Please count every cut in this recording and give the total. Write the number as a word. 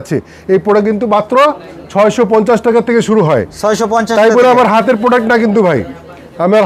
zero